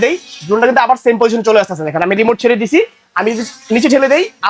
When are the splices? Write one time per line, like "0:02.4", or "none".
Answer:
none